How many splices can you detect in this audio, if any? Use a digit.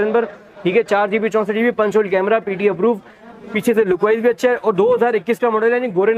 0